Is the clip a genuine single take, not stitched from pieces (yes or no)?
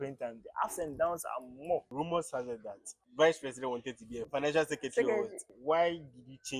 no